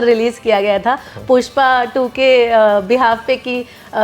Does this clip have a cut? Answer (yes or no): no